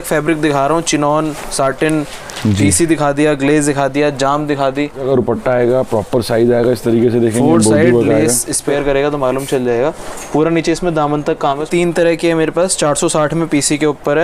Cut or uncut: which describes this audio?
cut